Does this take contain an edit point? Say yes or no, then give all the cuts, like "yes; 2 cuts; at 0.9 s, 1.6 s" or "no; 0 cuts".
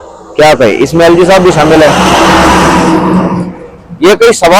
no; 0 cuts